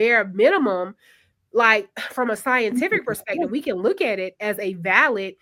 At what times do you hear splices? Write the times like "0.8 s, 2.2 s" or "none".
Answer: none